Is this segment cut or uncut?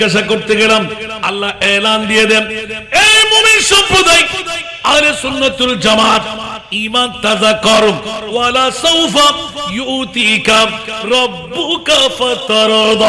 uncut